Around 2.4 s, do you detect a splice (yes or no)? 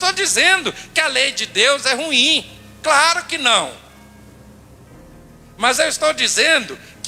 no